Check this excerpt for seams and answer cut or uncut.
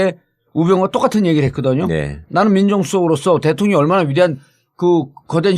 cut